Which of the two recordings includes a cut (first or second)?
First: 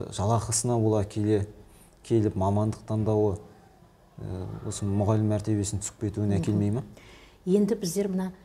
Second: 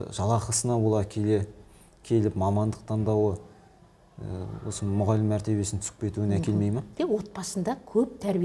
second